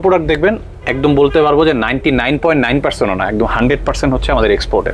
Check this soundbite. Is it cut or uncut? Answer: uncut